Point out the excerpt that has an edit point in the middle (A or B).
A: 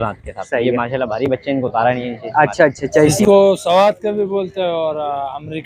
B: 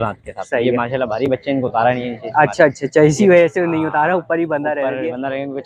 A